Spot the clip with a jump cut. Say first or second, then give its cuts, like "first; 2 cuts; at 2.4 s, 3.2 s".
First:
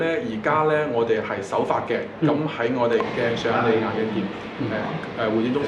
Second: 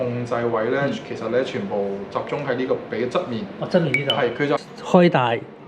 second; 1 cut; at 4.6 s